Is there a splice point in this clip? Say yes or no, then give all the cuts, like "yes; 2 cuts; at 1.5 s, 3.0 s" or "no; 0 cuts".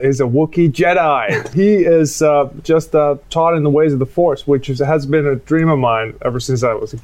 yes; 1 cut; at 1.5 s